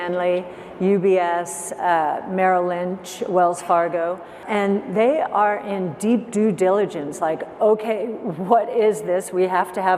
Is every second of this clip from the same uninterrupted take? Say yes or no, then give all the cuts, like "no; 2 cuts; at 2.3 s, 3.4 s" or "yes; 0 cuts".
no; 1 cut; at 4.4 s